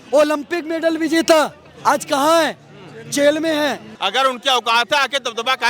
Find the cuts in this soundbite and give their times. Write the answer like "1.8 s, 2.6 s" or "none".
3.9 s